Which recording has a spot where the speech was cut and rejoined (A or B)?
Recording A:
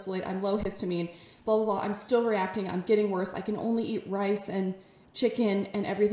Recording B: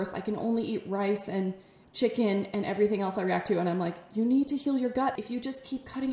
B